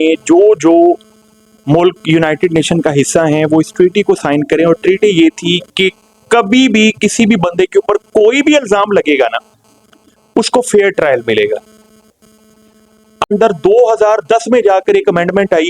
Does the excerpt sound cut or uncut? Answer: cut